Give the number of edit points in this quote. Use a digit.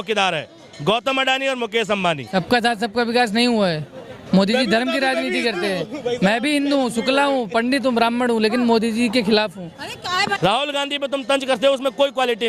2